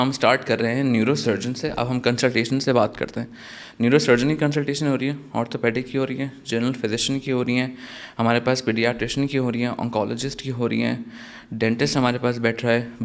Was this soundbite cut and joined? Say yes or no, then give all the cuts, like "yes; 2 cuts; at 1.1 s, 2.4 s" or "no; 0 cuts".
no; 0 cuts